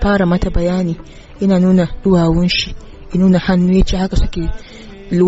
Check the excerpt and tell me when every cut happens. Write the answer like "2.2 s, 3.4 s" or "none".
none